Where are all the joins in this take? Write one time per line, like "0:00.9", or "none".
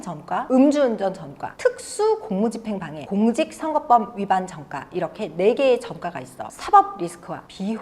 0:06.5